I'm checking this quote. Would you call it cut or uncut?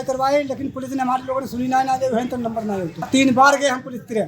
cut